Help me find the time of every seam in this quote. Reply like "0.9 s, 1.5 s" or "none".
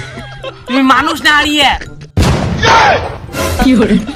none